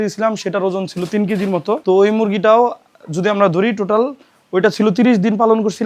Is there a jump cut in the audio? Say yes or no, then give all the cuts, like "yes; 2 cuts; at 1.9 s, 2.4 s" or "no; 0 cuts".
yes; 1 cut; at 1.8 s